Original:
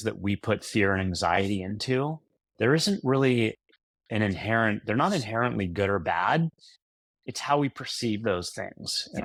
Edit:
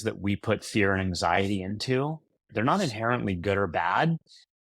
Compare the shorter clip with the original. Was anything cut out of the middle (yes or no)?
yes